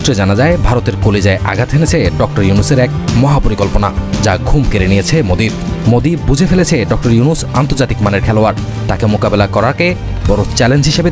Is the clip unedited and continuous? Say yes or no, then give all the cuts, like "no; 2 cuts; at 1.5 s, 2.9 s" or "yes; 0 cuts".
yes; 0 cuts